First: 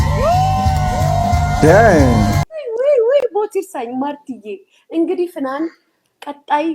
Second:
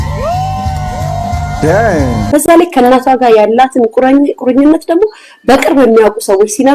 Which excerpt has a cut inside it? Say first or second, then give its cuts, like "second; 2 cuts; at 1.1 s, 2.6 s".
first; 1 cut; at 2.2 s